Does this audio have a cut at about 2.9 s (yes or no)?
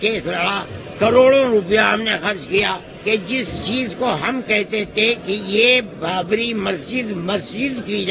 yes